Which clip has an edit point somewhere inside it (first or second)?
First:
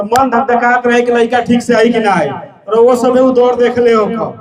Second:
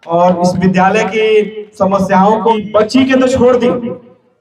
second